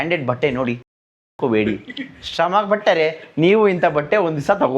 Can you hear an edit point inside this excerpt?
no; 0 cuts

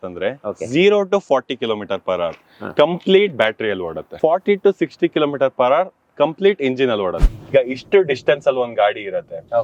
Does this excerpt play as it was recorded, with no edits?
no; 2 cuts; at 4.0 s, 7.2 s

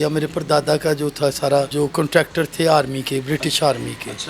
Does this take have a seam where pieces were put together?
yes; 1 cut; at 1.7 s

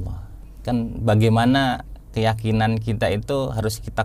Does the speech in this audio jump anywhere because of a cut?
no; 0 cuts

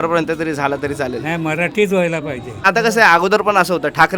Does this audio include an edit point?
yes; 1 cut; at 2.6 s

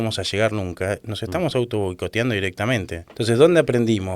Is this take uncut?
no; 1 cut; at 3.0 s

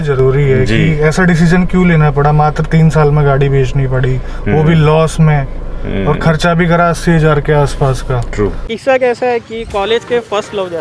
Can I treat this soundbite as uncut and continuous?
no; 1 cut; at 8.7 s

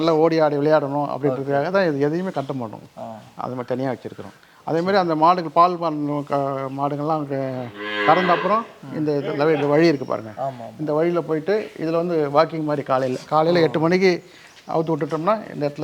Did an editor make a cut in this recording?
no; 0 cuts

